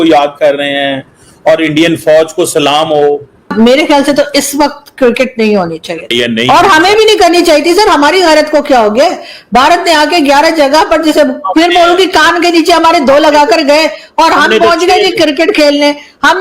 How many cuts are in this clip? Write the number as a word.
two